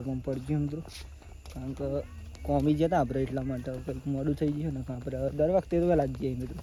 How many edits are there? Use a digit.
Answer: 0